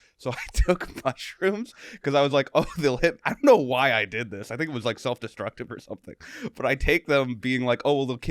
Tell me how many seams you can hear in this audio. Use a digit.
0